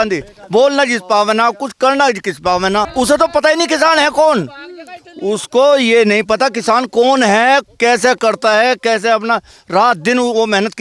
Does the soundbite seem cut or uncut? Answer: cut